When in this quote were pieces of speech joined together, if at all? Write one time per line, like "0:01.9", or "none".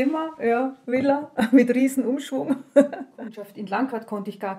0:03.5